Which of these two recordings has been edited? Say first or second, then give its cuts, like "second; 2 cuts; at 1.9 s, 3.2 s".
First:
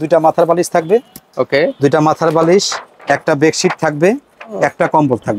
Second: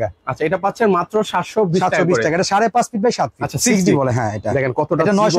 second; 1 cut; at 3.5 s